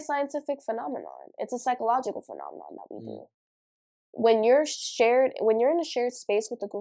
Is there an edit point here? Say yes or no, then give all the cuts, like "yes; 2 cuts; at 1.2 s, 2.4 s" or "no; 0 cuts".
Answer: no; 0 cuts